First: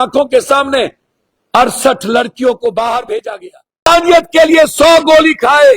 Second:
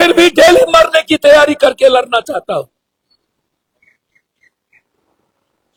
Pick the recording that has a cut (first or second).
first